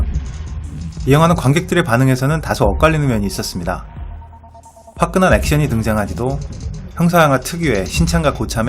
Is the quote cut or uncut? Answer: cut